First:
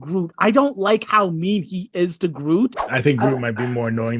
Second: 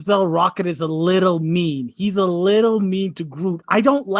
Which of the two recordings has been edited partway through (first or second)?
first